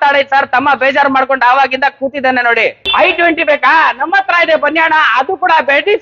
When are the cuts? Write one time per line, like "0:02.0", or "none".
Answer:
0:02.9